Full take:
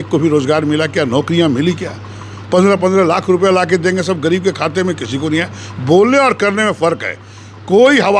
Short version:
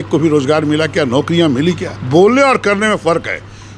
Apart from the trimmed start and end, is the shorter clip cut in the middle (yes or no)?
yes